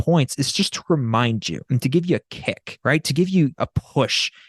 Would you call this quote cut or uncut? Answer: cut